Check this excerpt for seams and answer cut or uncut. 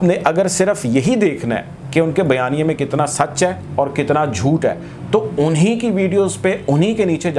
uncut